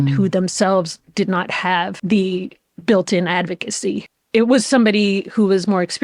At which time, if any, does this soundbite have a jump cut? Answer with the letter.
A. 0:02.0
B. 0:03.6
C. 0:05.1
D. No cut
A